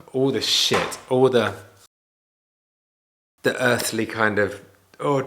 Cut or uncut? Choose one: uncut